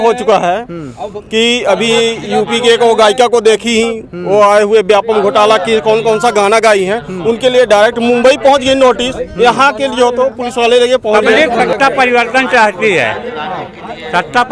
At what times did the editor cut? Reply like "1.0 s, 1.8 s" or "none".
11.3 s